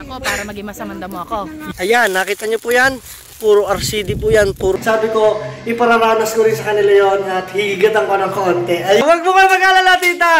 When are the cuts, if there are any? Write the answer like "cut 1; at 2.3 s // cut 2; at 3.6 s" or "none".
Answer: cut 1; at 1.6 s // cut 2; at 4.8 s // cut 3; at 9.0 s